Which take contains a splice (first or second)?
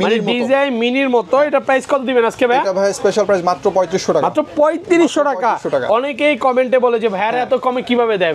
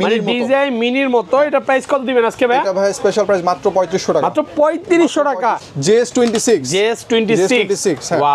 second